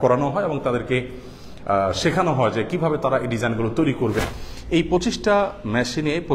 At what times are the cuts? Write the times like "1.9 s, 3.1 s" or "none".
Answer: 4.2 s